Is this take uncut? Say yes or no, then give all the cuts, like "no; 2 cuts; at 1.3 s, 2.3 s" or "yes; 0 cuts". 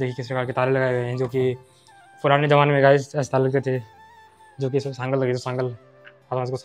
yes; 0 cuts